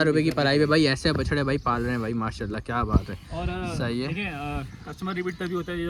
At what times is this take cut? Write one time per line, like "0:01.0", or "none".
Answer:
none